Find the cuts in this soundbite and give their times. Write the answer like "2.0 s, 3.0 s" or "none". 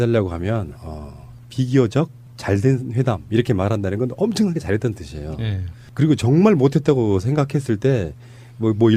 7.2 s